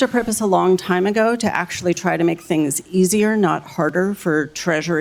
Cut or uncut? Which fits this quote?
uncut